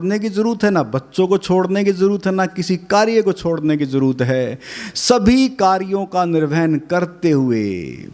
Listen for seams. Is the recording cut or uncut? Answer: uncut